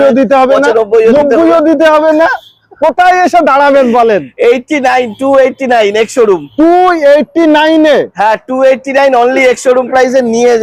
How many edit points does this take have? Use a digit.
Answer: 0